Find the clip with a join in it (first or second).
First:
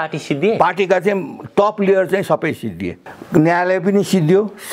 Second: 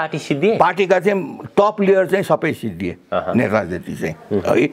first